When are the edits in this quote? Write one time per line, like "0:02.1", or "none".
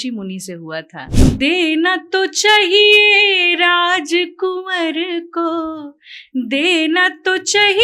0:01.0

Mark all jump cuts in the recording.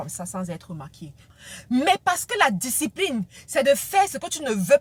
0:01.3

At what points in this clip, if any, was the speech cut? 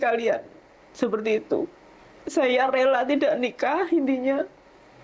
none

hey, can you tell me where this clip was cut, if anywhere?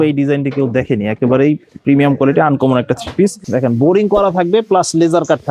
0:03.4

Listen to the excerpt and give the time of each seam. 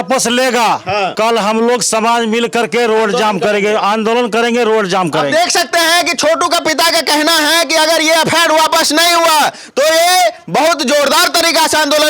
0:01.1

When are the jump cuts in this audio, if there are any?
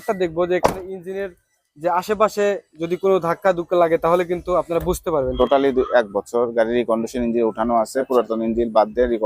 0:05.3

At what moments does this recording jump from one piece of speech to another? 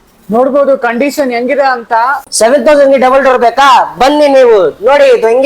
0:02.3

